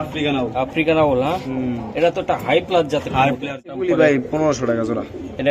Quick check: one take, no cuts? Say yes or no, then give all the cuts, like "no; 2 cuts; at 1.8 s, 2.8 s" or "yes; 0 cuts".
no; 1 cut; at 3.7 s